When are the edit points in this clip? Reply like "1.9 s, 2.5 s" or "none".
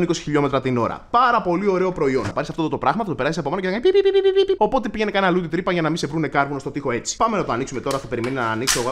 2.3 s, 4.6 s, 7.1 s